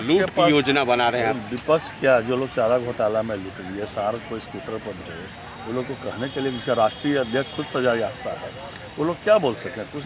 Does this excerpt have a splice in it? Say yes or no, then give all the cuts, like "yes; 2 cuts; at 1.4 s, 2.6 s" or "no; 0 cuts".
no; 0 cuts